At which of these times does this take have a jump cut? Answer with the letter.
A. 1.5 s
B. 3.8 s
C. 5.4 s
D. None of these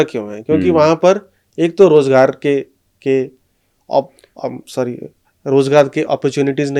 D